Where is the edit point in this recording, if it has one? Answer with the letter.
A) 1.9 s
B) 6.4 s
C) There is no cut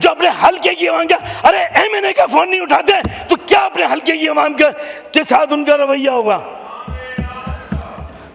C